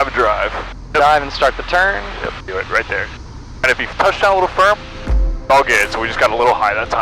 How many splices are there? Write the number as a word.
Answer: one